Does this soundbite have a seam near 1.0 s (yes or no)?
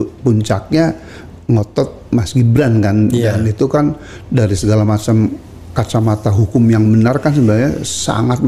no